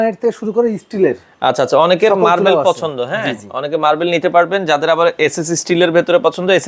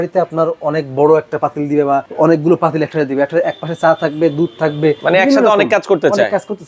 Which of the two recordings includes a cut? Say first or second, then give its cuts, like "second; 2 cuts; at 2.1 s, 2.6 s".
second; 2 cuts; at 2.1 s, 5.0 s